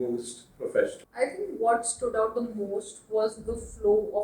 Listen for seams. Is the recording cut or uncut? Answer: cut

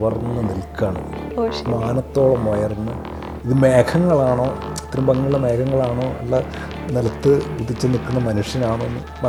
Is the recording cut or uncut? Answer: uncut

